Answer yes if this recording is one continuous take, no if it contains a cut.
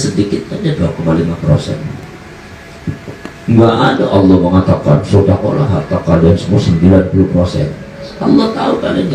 yes